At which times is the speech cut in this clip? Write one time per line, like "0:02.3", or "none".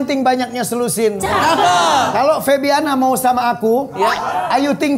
none